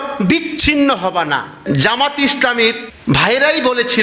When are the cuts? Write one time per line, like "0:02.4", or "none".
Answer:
0:01.6